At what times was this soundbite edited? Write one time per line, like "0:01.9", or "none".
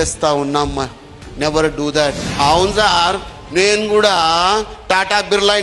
0:02.2